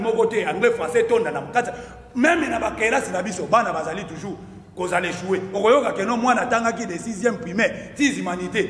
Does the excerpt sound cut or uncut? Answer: uncut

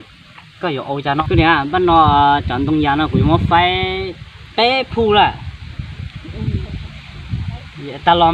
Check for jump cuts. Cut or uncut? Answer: cut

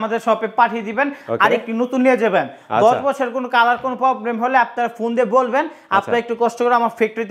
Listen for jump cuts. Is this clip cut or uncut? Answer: uncut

